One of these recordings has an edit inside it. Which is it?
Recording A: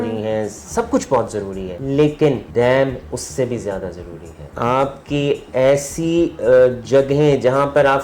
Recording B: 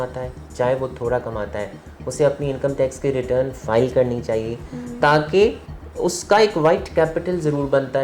A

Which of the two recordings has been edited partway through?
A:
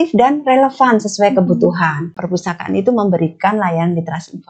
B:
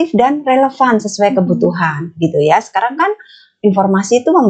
A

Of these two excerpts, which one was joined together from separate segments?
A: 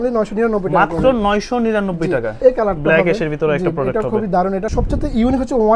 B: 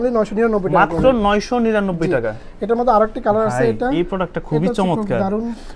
A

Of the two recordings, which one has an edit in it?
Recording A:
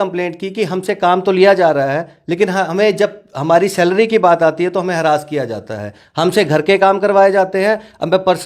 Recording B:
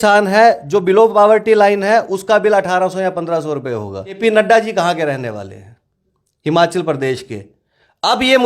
B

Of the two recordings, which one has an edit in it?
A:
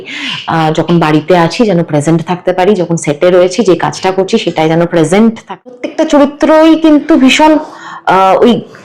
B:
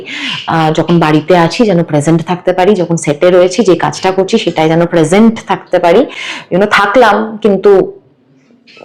A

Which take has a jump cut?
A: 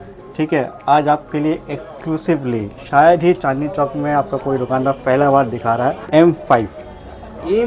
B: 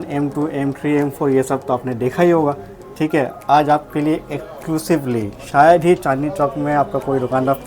A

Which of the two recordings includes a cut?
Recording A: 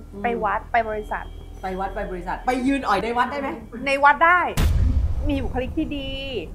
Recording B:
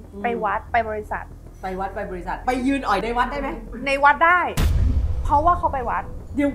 A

